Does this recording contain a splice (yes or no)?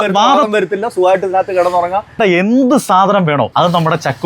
yes